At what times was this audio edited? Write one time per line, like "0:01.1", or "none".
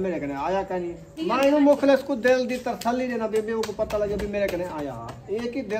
0:01.1